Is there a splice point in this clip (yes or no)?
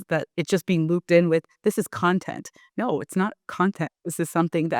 no